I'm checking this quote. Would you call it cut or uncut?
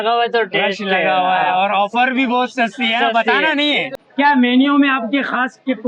cut